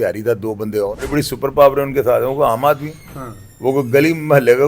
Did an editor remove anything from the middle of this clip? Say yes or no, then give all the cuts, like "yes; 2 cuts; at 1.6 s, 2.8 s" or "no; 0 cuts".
yes; 1 cut; at 1.1 s